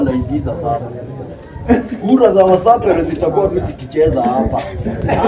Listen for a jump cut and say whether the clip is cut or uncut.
uncut